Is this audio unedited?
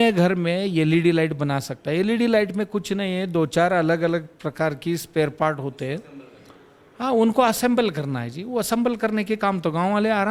yes; 0 cuts

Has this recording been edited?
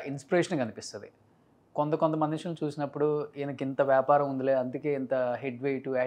no; 0 cuts

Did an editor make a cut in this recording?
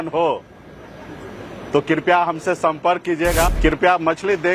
yes; 1 cut; at 3.5 s

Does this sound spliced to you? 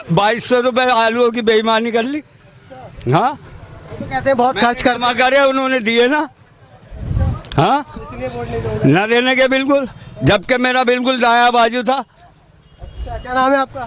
no; 0 cuts

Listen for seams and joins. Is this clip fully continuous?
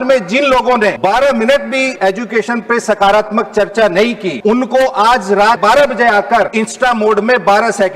no; 5 cuts; at 1.0 s, 1.9 s, 4.3 s, 5.6 s, 6.5 s

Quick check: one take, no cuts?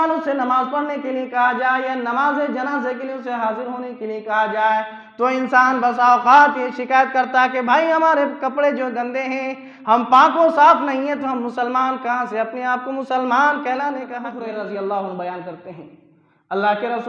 no; 1 cut; at 14.3 s

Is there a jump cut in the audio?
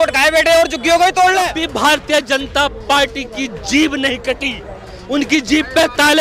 yes; 1 cut; at 1.6 s

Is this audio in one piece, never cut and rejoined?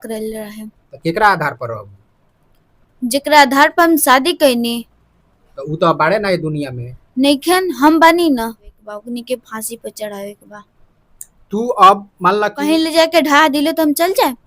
no; 2 cuts; at 8.8 s, 12.6 s

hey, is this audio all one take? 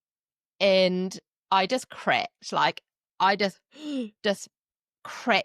yes; 0 cuts

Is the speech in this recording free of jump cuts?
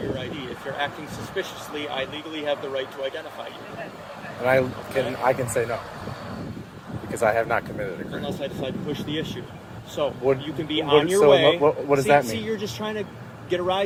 yes; 0 cuts

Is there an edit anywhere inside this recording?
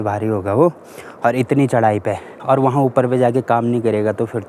no; 0 cuts

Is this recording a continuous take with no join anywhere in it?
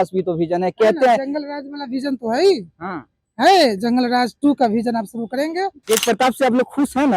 no; 1 cut; at 5.8 s

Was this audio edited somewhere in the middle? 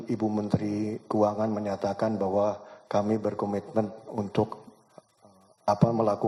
no; 0 cuts

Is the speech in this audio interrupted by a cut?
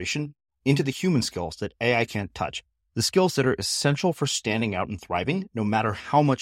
no; 0 cuts

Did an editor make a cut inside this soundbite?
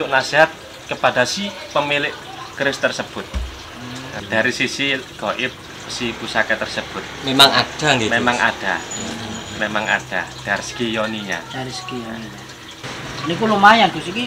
yes; 2 cuts; at 4.1 s, 12.9 s

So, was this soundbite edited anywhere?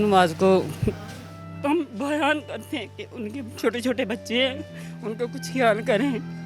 no; 0 cuts

